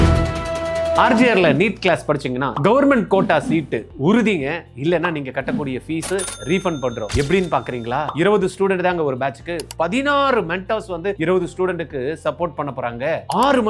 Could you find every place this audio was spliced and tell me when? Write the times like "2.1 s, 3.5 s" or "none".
1.0 s